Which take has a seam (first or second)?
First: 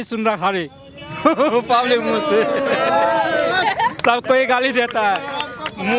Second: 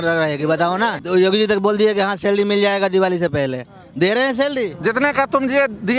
second